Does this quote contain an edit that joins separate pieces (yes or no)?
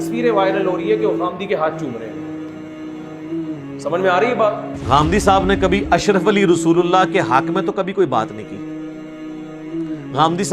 yes